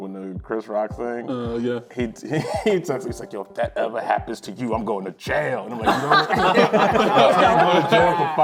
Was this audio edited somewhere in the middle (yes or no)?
no